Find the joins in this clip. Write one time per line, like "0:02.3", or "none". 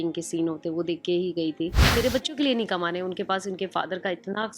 0:01.9